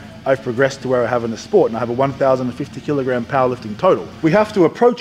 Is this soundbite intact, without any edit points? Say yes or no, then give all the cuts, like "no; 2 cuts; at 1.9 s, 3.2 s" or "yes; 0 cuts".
no; 1 cut; at 4.1 s